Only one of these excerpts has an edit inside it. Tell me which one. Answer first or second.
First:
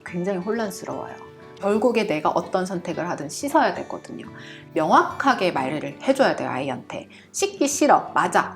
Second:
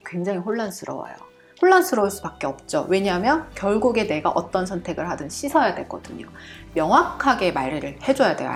first